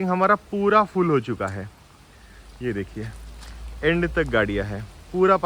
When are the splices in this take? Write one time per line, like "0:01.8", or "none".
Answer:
none